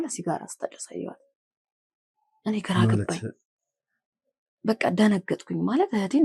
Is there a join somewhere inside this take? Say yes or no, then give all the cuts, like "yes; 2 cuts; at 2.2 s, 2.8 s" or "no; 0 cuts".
no; 0 cuts